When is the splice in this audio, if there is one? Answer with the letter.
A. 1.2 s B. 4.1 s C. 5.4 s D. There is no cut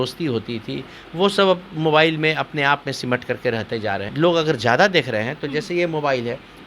B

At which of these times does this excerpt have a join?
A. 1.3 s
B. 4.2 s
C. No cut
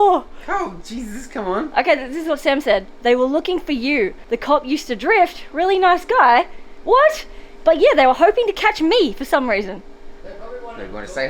B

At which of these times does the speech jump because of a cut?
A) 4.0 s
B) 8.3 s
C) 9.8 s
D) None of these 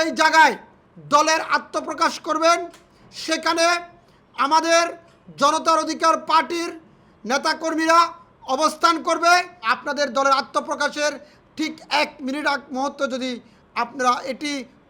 C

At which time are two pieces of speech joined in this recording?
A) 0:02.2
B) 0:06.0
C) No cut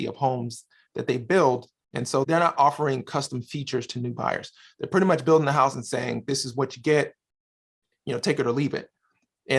A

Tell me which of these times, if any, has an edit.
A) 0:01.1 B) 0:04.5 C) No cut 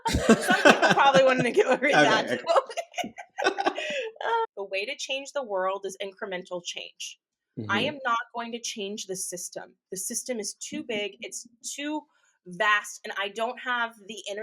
B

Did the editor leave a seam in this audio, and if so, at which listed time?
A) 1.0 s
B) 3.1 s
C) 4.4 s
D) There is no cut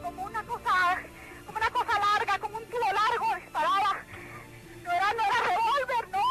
D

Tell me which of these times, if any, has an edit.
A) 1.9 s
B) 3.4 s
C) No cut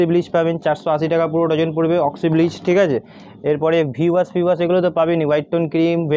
C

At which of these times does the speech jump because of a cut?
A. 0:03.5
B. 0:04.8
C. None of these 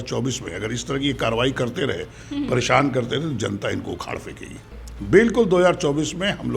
B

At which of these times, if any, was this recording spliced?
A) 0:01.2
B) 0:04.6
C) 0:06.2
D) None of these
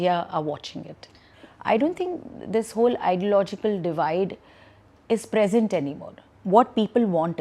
A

